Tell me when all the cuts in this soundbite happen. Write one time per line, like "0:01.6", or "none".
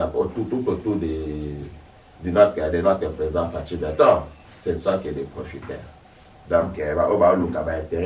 none